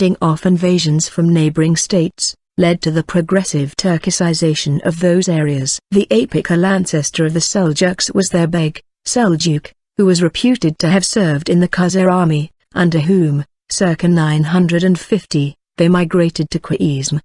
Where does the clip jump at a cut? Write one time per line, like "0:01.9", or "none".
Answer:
0:05.2